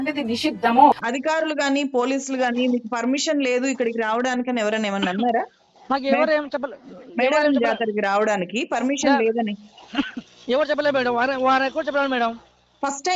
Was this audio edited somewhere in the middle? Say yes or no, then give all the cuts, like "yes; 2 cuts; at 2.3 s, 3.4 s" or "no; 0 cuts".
yes; 1 cut; at 1.0 s